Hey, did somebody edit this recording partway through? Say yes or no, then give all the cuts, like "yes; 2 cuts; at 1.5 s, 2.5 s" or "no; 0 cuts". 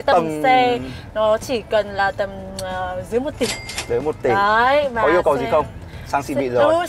no; 0 cuts